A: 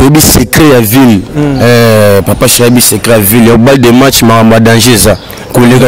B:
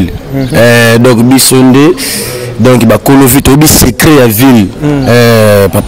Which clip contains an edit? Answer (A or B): A